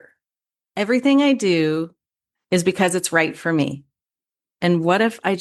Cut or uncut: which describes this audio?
uncut